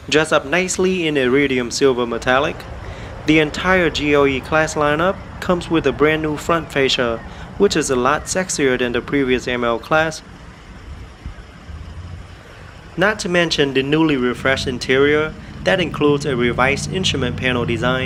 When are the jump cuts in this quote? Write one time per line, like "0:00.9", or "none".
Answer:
none